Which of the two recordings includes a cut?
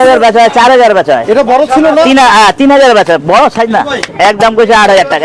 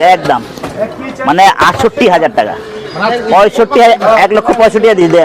first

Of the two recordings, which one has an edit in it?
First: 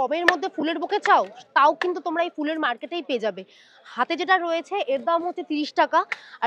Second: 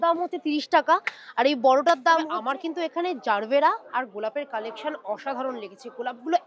second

